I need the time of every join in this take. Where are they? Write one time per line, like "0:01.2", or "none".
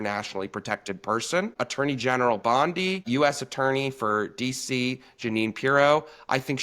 0:01.5
0:03.0